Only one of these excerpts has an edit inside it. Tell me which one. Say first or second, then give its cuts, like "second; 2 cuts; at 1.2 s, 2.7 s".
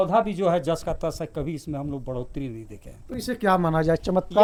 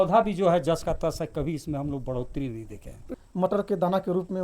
second; 1 cut; at 3.1 s